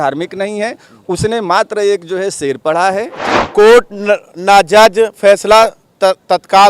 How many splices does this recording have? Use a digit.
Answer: 1